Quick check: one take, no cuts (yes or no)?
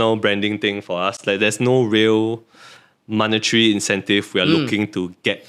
yes